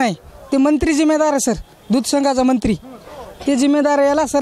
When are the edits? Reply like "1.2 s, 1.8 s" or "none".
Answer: none